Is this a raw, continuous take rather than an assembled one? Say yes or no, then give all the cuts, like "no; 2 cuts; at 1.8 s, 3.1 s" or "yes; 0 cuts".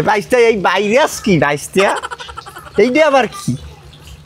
yes; 0 cuts